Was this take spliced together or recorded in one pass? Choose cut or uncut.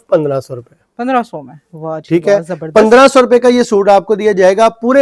uncut